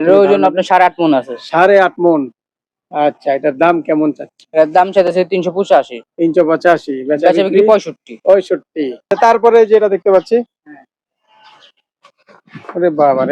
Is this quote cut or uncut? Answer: cut